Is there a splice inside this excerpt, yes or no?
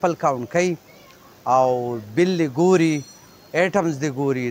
no